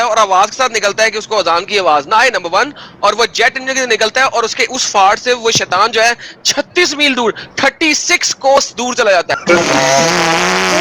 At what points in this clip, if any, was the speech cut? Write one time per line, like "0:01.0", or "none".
none